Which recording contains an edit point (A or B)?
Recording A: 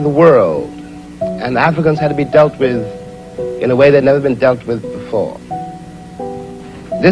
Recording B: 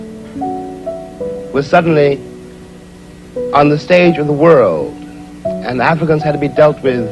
B